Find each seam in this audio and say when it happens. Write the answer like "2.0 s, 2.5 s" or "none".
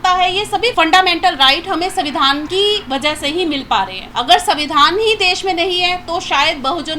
0.7 s, 2.5 s, 4.0 s